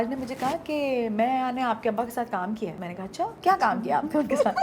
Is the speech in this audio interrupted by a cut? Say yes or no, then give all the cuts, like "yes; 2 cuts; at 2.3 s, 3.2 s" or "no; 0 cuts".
yes; 1 cut; at 3.2 s